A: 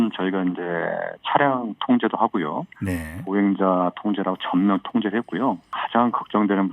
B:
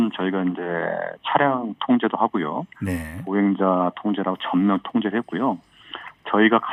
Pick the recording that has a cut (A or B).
A